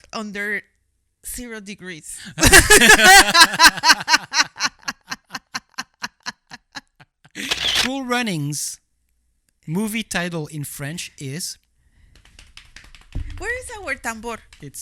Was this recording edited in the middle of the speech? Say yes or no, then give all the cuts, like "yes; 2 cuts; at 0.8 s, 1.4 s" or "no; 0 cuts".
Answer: yes; 1 cut; at 7.6 s